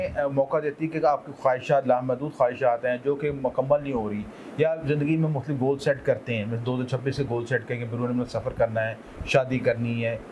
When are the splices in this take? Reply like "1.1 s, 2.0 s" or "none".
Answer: none